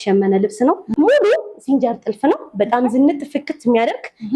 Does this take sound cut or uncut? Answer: cut